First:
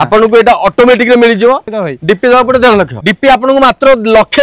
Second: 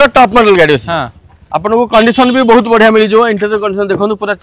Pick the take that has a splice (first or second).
first